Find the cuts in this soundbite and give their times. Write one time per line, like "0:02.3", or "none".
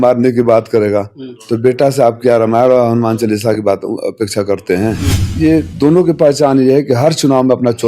0:05.2